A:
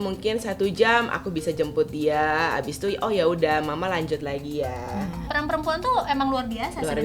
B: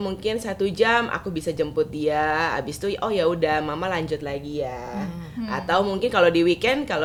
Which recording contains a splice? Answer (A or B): A